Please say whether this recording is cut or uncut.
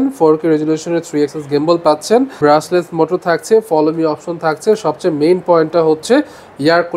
cut